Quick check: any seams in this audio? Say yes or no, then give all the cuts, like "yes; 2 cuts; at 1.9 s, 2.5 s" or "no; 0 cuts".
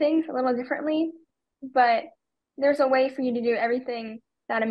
no; 0 cuts